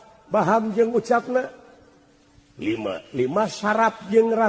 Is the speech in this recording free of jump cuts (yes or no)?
yes